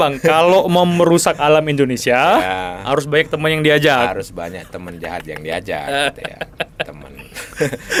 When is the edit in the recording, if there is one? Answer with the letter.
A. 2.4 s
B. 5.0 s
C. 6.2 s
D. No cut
D